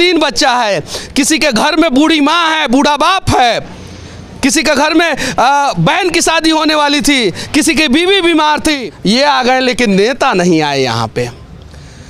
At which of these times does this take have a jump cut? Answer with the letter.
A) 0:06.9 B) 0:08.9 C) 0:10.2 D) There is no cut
B